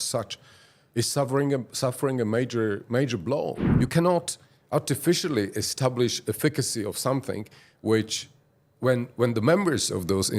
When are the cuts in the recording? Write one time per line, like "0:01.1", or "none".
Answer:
0:03.6